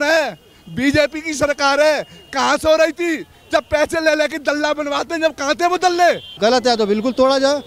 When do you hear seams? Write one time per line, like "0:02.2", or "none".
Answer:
0:06.3